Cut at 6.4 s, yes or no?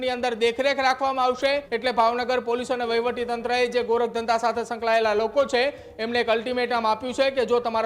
no